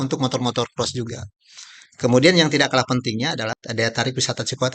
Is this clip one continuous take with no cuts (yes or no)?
no